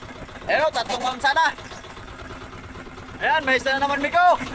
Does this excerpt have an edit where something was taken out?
yes; 1 cut; at 2.0 s

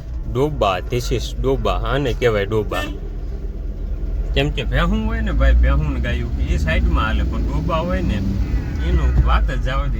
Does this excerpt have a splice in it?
no; 0 cuts

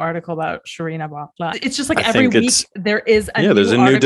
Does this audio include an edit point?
no; 0 cuts

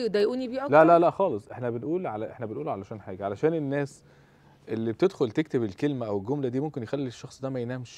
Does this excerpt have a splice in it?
no; 0 cuts

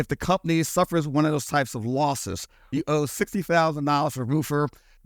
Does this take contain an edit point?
yes; 1 cut; at 2.6 s

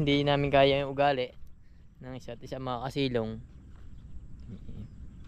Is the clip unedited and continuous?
yes; 0 cuts

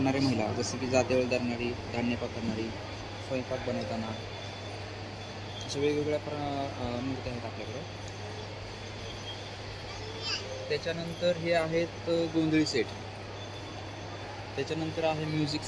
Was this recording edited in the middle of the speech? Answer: no; 0 cuts

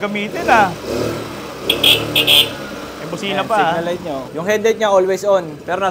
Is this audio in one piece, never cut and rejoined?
no; 1 cut; at 4.3 s

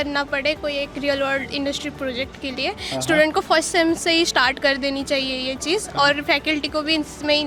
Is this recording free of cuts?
yes; 0 cuts

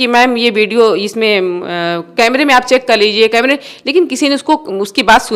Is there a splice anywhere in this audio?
no; 0 cuts

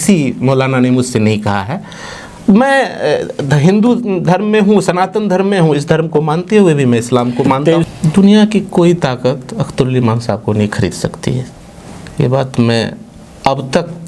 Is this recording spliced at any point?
yes; 1 cut; at 7.8 s

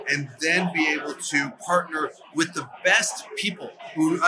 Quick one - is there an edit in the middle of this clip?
no; 0 cuts

